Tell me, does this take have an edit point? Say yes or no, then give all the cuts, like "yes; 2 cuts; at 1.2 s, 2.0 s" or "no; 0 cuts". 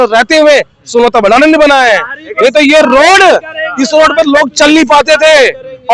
no; 0 cuts